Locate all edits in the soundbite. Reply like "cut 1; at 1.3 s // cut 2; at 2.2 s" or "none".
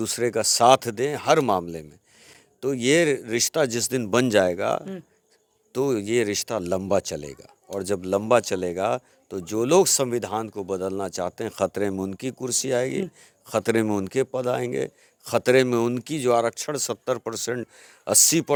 none